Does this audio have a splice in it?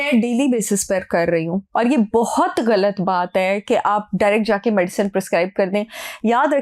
no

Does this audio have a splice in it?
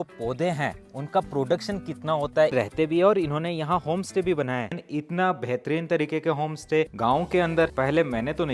yes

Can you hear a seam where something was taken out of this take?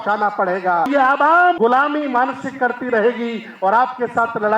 yes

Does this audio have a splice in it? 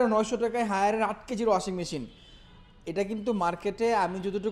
no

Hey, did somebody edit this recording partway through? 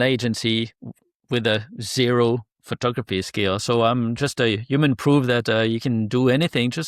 no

